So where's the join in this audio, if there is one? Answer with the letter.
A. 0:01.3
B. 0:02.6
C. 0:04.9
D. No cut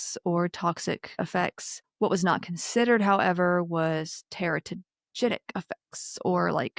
A